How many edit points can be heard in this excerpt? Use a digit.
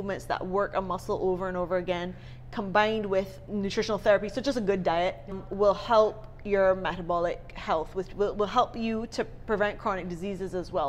0